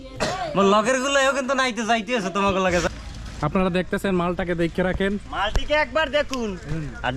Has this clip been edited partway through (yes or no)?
yes